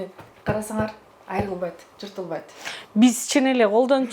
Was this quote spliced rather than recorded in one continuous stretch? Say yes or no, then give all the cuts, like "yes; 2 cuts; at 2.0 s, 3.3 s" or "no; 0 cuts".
no; 0 cuts